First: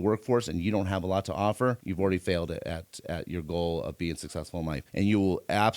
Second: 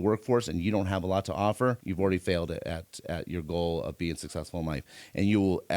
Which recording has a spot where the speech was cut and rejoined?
first; 1 cut; at 4.8 s

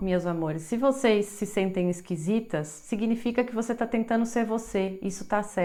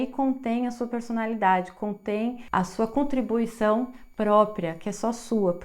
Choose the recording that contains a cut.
second; 1 cut; at 2.4 s

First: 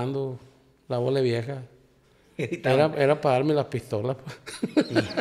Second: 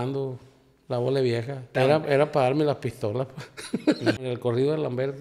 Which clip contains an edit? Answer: second; 2 cuts; at 1.7 s, 4.2 s

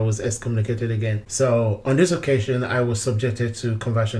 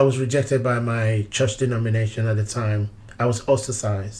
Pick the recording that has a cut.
first; 1 cut; at 1.2 s

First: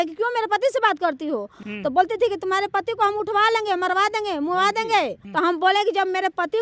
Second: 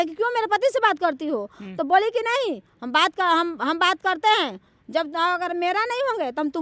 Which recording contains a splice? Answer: first; 2 cuts; at 1.6 s, 5.2 s

